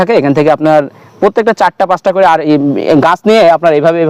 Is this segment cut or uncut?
uncut